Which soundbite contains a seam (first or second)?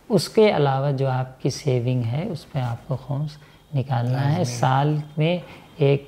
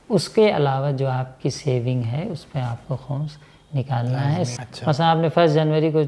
second